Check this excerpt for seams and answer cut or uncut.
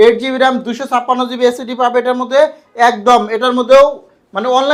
uncut